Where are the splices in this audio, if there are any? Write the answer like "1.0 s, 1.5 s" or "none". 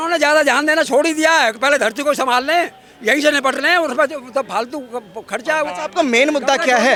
none

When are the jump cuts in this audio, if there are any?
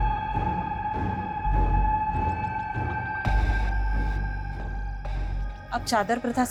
none

